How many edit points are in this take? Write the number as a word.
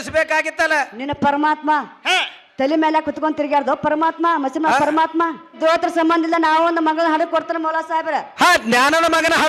one